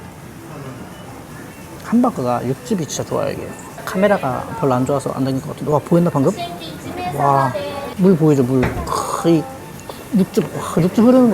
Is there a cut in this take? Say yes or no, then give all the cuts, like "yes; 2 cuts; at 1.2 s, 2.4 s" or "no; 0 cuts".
yes; 2 cuts; at 1.7 s, 7.8 s